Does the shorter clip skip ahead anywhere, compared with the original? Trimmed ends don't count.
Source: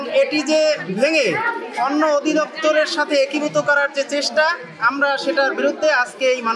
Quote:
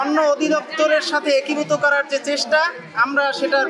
no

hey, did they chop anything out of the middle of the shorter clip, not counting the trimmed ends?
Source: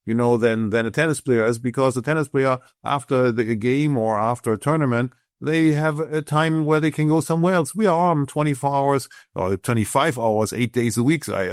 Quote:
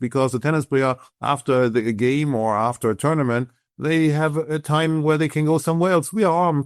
no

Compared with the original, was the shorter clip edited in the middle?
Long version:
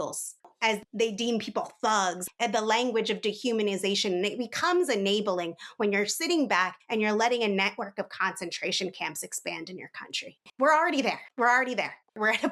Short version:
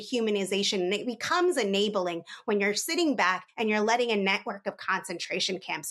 no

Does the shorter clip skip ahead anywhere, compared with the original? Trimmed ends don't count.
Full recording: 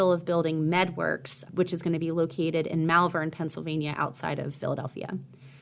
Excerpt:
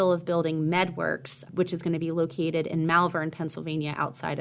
no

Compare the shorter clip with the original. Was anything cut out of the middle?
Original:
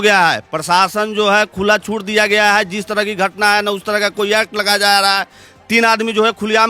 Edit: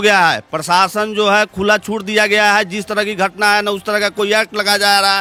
no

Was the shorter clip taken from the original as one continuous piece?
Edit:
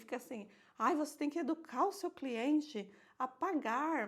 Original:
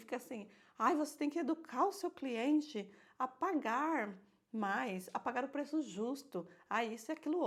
yes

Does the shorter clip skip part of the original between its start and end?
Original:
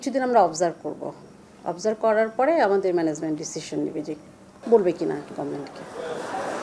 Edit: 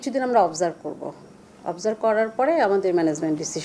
no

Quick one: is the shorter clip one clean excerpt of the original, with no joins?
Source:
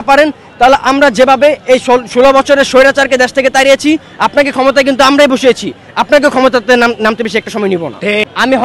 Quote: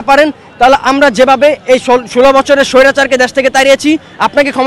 yes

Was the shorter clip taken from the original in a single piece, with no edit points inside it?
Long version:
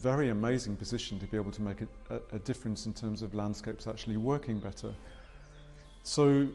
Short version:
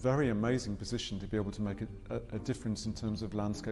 yes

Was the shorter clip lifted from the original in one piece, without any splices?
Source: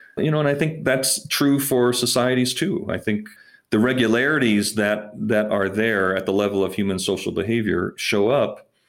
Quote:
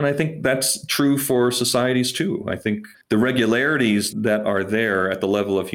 no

